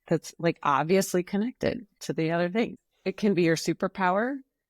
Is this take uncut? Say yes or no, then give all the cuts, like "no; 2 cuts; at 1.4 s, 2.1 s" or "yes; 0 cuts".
no; 1 cut; at 2.7 s